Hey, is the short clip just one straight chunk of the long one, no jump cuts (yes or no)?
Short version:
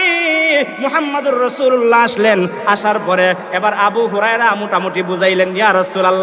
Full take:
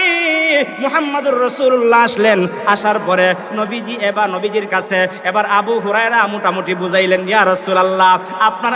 no